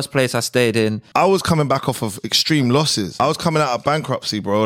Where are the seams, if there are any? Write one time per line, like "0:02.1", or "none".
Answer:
0:01.0
0:03.2